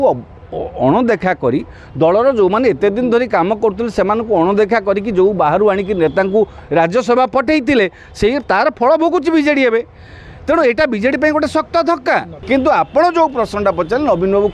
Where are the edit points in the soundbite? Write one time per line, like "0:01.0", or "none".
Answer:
0:12.3